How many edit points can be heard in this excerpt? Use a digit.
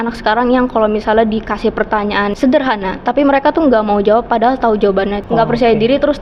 2